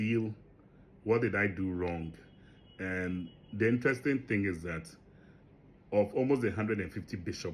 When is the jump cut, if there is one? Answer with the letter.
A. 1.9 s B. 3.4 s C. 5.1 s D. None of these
D